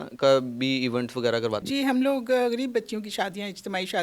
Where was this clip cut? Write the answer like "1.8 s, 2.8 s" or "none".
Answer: 1.6 s